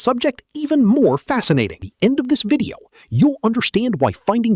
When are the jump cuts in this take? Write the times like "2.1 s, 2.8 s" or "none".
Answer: 1.9 s